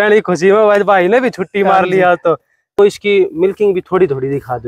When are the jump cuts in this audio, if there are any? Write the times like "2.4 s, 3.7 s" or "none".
2.8 s